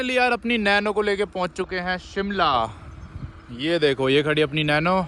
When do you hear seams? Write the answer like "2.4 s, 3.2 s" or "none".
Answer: none